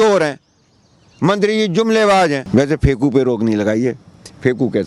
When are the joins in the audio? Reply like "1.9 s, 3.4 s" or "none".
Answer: 2.4 s